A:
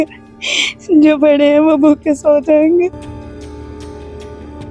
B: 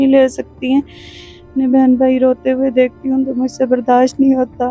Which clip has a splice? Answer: B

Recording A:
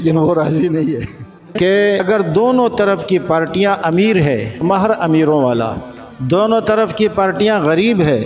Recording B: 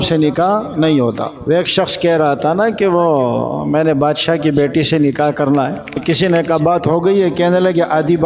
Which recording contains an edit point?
A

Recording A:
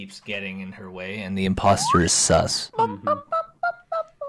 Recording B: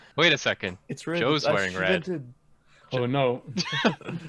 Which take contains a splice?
A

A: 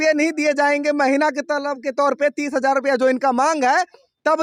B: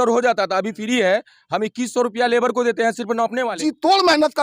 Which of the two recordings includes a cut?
B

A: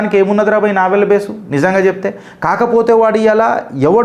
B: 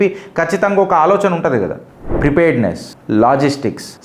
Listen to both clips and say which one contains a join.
B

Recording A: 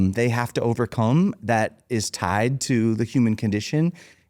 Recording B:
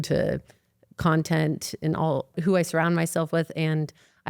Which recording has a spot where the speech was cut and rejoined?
B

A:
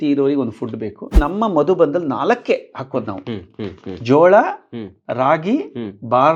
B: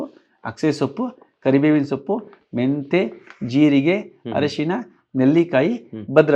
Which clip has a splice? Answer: A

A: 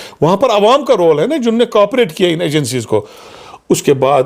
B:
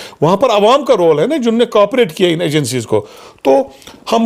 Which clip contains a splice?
A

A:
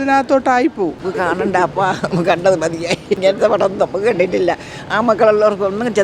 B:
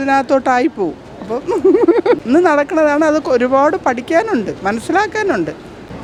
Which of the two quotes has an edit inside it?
A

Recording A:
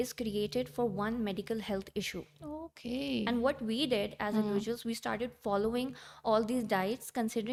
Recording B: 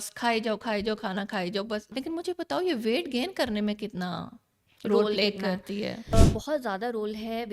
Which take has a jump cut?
B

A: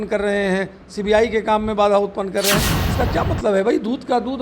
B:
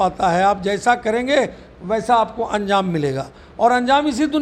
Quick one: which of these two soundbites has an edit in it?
A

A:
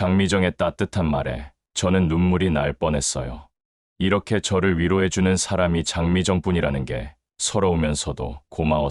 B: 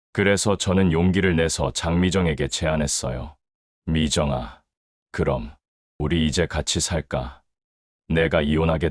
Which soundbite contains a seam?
B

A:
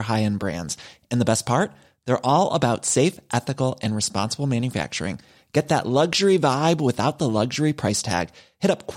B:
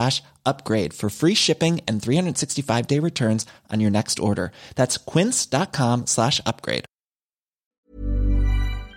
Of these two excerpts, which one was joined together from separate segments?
B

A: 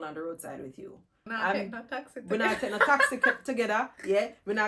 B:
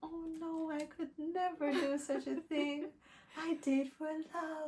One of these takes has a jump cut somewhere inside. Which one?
A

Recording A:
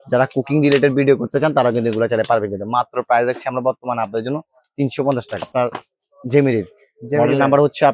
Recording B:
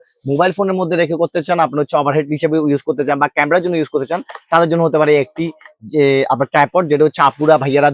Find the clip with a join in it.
A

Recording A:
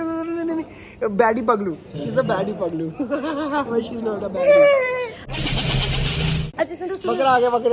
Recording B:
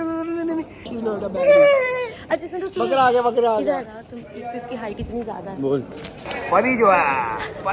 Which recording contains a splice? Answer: B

